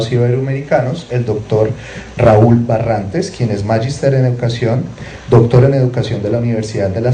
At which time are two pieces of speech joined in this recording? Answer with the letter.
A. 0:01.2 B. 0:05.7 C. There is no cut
C